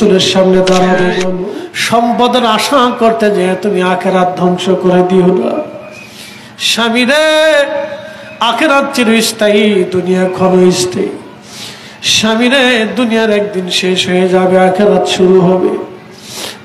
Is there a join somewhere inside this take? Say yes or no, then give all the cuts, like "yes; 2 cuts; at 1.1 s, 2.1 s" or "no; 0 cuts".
yes; 1 cut; at 1.3 s